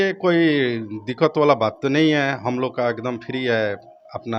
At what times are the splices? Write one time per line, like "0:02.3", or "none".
none